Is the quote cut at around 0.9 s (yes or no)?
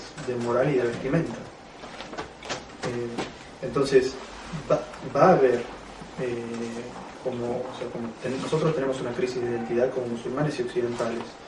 yes